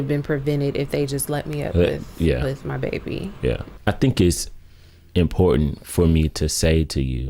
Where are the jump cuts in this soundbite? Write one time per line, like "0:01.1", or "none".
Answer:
0:03.7